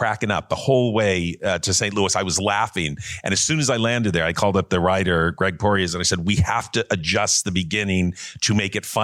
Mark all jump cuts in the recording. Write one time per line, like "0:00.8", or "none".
none